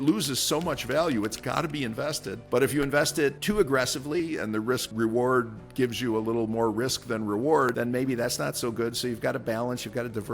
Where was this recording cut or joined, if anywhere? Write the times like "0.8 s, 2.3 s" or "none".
2.3 s, 3.4 s, 4.9 s, 7.7 s